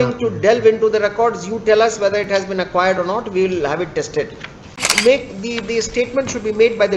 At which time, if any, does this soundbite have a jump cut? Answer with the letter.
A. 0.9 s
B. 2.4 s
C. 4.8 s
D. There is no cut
C